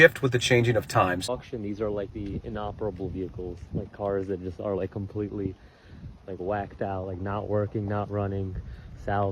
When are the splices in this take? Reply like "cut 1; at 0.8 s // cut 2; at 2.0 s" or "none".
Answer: cut 1; at 1.3 s